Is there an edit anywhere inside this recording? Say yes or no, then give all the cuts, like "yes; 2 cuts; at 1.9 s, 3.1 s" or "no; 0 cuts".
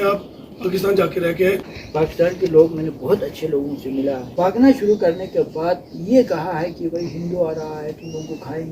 yes; 2 cuts; at 1.8 s, 4.3 s